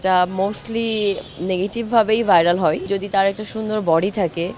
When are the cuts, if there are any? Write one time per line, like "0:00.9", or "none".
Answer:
0:02.9